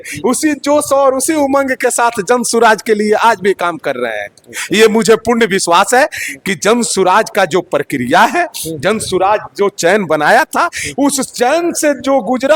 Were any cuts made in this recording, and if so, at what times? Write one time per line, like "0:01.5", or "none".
none